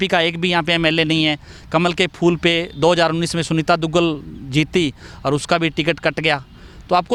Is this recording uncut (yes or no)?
yes